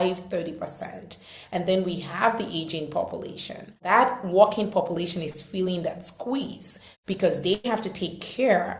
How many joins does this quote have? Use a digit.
1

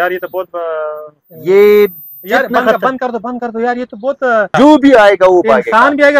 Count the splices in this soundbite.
1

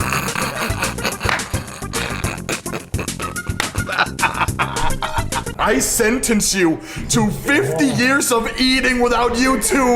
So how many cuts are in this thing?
1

